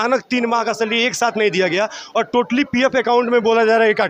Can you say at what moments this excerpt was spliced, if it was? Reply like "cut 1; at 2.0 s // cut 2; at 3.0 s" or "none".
none